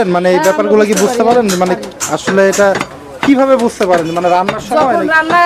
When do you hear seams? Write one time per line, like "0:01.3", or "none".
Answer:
none

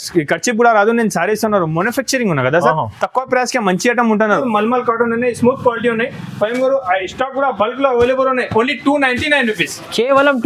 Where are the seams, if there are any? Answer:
0:04.3

